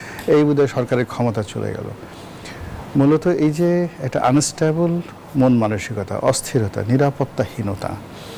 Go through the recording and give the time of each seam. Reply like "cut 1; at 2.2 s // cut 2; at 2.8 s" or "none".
none